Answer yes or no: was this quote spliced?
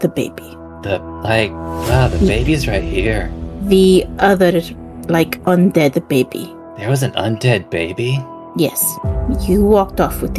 no